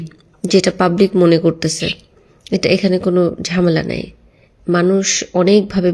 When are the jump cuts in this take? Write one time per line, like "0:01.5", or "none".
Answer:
none